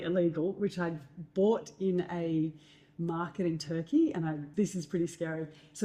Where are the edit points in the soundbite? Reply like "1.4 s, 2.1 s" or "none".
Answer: 4.5 s